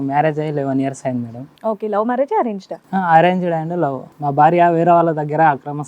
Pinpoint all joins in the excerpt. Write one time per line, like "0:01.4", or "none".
0:04.1